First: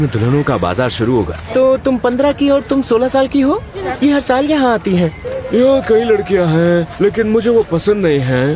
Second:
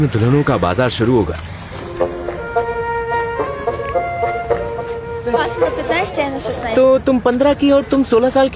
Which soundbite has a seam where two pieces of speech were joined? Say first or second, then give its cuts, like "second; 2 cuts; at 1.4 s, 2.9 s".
first; 3 cuts; at 1.4 s, 3.8 s, 5.3 s